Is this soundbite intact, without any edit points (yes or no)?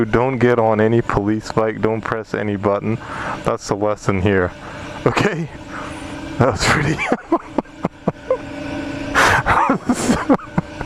yes